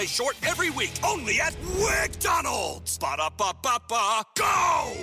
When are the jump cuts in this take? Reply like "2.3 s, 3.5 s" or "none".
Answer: none